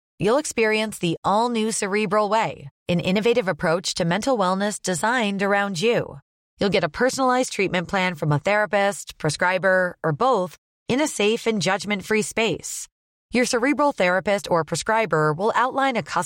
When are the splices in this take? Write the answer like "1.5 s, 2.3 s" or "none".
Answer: none